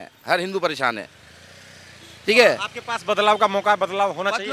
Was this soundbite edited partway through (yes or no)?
no